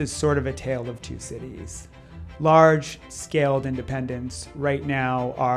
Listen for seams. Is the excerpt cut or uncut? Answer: uncut